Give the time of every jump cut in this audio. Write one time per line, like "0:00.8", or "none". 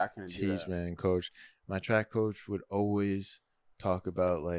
0:01.4